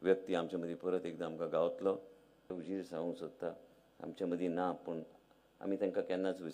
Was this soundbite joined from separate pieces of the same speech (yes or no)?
yes